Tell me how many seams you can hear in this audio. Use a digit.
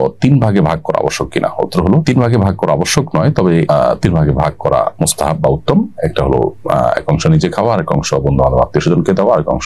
0